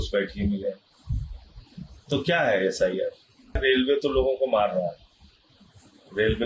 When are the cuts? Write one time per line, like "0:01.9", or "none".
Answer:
0:03.6